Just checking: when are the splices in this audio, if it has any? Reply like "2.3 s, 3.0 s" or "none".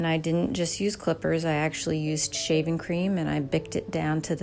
none